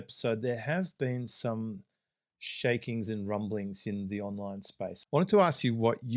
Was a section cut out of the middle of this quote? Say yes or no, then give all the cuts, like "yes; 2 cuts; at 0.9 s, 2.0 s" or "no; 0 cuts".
yes; 1 cut; at 5.0 s